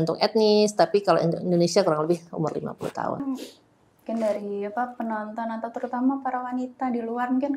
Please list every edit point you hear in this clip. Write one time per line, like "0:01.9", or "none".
0:03.2